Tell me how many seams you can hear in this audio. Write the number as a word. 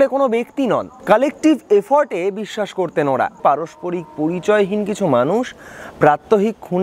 two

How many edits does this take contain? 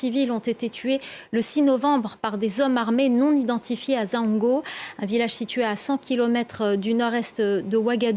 zero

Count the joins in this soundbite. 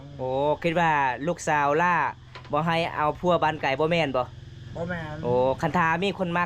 zero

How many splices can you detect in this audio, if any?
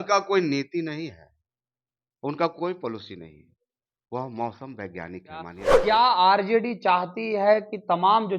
one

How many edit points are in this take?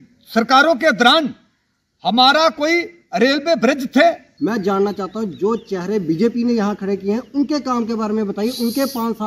one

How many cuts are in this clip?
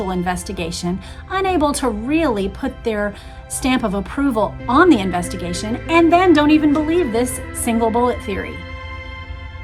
zero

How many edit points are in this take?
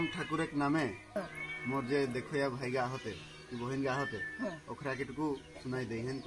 one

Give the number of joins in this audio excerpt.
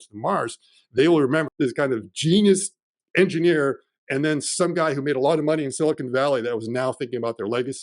one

